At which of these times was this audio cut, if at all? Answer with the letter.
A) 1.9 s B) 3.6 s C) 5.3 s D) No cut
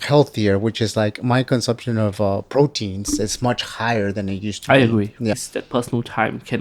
C